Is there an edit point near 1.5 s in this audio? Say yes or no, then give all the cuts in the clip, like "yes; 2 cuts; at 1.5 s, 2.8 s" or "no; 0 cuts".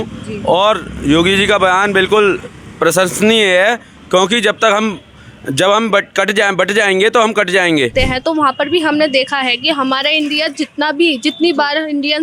no; 1 cut; at 7.9 s